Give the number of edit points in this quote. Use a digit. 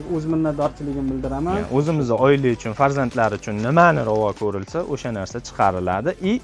1